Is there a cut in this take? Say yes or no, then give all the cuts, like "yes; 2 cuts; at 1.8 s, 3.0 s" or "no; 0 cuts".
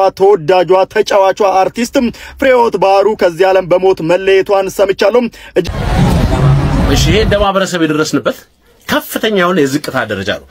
yes; 1 cut; at 5.6 s